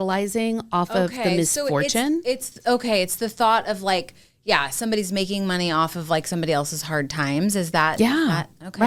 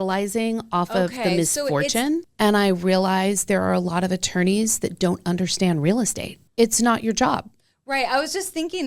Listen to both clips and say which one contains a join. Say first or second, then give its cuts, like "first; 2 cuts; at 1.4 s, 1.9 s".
second; 2 cuts; at 2.2 s, 6.3 s